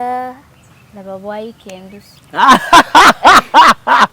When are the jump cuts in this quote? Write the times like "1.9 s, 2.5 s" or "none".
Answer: none